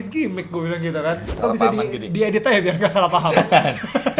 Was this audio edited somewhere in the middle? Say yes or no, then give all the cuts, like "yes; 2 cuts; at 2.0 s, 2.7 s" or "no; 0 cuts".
yes; 1 cut; at 1.3 s